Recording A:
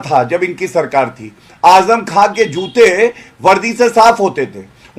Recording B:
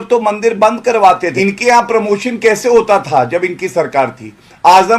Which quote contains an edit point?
B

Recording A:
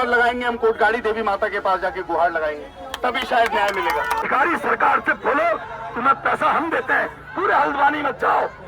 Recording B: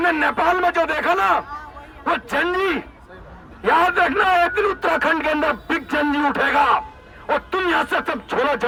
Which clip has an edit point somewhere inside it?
A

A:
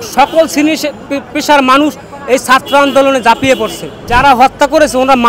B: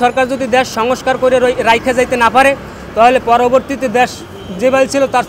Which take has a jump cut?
A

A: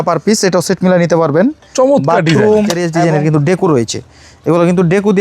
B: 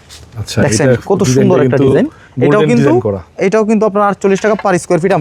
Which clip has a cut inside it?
A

